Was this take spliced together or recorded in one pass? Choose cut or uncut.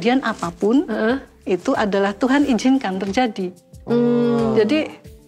uncut